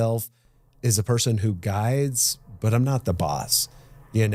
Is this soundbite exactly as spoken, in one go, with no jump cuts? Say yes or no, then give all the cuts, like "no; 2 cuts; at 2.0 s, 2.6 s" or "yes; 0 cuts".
yes; 0 cuts